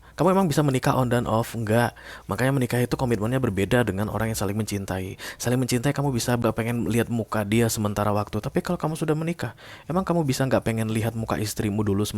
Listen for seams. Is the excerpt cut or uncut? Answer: cut